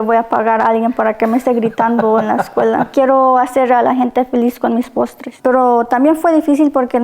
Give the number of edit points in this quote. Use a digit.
2